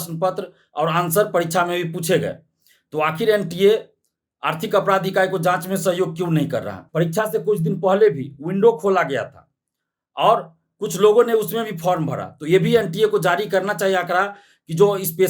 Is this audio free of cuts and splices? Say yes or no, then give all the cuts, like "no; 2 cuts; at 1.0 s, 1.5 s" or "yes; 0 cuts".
no; 1 cut; at 6.8 s